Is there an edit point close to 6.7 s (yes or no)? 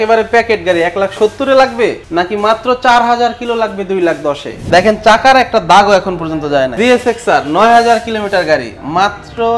yes